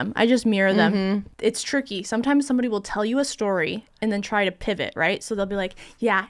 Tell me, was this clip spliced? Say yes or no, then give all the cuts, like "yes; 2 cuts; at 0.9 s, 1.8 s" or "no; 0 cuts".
yes; 1 cut; at 1.3 s